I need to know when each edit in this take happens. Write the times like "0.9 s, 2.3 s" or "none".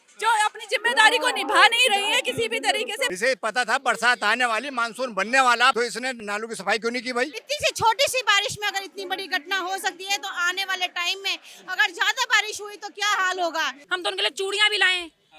3.1 s, 6.2 s, 7.3 s, 13.8 s

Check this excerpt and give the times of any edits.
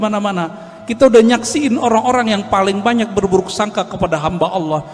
none

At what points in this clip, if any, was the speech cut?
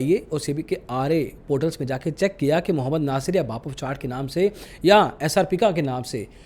none

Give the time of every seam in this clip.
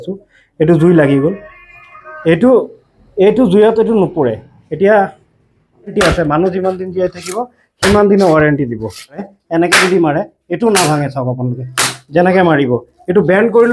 5.9 s, 9.4 s

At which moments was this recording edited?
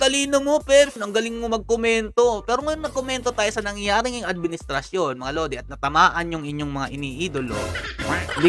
none

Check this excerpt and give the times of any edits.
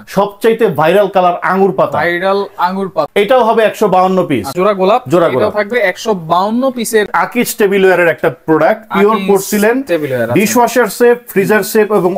4.5 s, 7.1 s

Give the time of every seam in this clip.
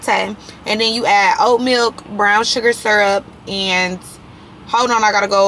none

